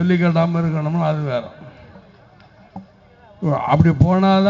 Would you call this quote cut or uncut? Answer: uncut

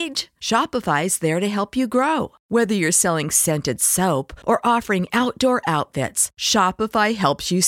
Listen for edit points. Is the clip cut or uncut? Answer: uncut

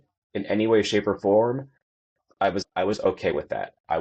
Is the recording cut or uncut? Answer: cut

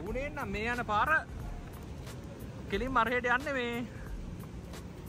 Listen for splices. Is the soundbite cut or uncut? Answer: uncut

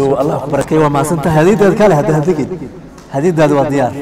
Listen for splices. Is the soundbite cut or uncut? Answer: uncut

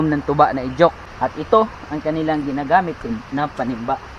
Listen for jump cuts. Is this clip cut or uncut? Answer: cut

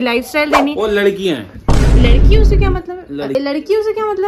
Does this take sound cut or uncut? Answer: cut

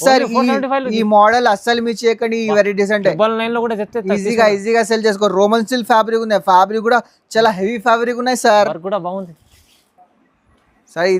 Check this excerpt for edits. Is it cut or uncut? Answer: uncut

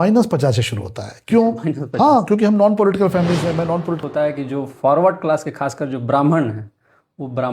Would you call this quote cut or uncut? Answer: cut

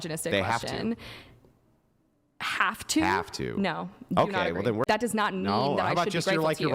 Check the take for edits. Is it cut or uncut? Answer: cut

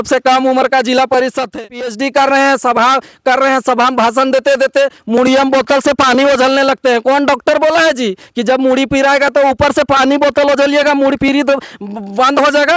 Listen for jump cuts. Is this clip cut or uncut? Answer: cut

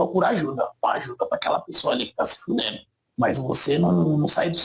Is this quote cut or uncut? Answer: uncut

